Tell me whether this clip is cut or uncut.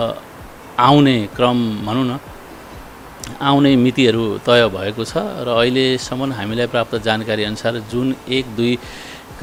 uncut